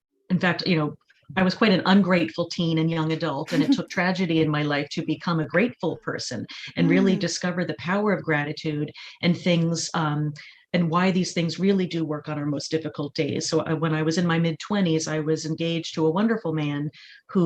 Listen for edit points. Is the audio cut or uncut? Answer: uncut